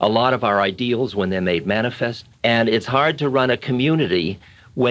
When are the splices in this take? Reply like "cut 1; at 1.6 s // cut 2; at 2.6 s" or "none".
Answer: cut 1; at 2.2 s